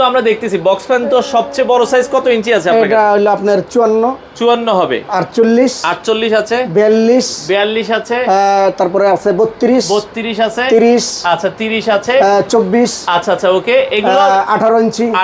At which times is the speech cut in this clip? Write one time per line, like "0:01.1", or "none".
none